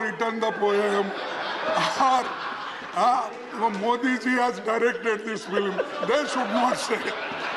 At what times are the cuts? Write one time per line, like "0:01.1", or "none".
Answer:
none